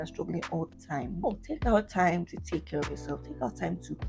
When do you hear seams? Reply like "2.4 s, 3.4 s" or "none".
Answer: 1.2 s